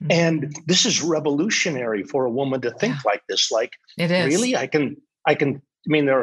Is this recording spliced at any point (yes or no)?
no